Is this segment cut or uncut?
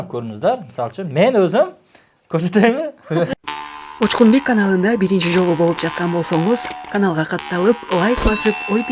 cut